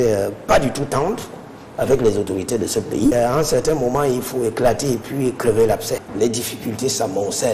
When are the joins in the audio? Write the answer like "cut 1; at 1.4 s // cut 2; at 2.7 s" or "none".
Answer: cut 1; at 3.1 s // cut 2; at 6.1 s